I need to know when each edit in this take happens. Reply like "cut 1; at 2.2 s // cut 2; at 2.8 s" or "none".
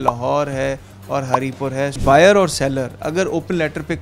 cut 1; at 2.0 s